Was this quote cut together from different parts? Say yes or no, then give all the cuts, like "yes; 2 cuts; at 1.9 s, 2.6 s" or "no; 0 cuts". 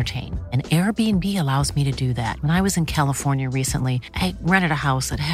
no; 0 cuts